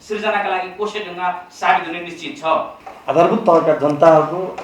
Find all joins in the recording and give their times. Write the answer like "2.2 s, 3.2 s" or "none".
2.8 s